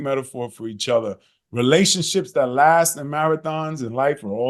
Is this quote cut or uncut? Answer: uncut